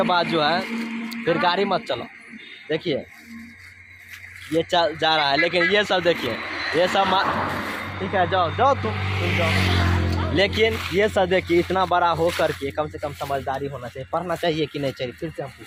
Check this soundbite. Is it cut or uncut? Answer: uncut